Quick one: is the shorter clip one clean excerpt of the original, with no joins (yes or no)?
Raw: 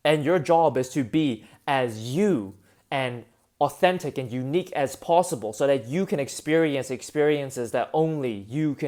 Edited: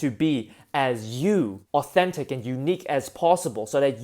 no